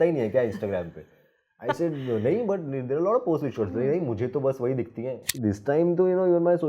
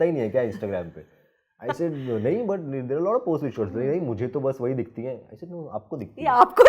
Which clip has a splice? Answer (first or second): first